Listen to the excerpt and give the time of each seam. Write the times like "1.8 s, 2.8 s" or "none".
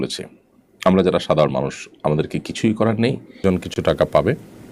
3.3 s